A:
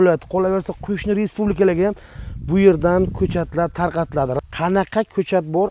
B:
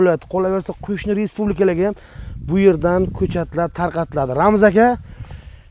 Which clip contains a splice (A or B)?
A